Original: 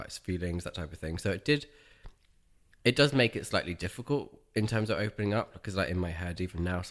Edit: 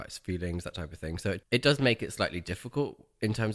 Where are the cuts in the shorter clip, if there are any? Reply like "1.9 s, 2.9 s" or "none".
1.4 s